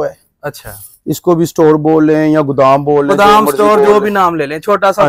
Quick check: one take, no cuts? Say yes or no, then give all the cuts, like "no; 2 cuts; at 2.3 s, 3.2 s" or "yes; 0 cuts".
yes; 0 cuts